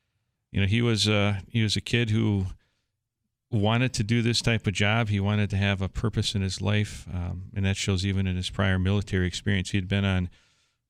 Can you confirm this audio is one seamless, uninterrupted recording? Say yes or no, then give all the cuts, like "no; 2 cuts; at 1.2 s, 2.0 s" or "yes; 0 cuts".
yes; 0 cuts